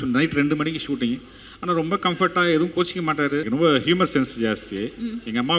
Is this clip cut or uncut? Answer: cut